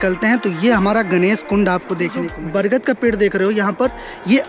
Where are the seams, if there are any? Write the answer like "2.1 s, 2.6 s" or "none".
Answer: 2.3 s